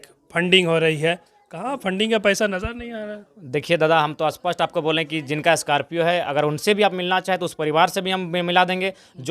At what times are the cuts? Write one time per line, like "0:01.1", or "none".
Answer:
none